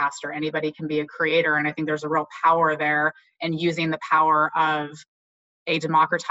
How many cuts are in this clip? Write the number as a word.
zero